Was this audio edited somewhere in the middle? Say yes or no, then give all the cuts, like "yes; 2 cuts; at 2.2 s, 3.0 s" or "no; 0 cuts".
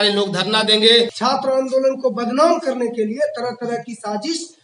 yes; 1 cut; at 1.2 s